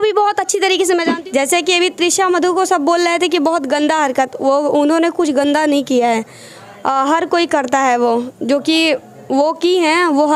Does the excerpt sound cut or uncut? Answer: cut